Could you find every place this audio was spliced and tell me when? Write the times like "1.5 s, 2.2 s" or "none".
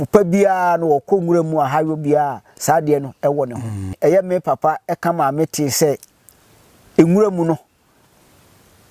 4.0 s